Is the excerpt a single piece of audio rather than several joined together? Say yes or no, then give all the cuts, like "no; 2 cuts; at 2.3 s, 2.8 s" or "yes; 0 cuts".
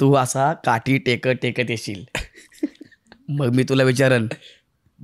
yes; 0 cuts